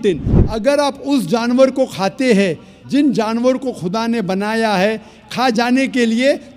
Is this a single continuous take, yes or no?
yes